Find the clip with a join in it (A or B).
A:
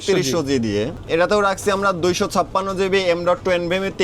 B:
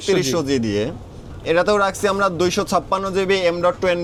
A